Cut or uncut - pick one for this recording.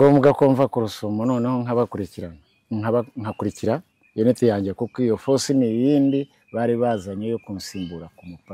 uncut